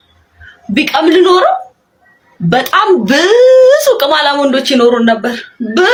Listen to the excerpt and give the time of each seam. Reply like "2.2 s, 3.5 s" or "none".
none